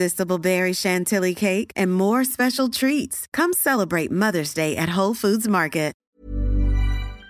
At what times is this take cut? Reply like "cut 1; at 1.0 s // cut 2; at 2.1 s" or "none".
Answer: cut 1; at 6.0 s